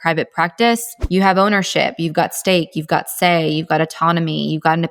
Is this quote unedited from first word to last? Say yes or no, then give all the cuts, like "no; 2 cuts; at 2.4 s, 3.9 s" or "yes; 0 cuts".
yes; 0 cuts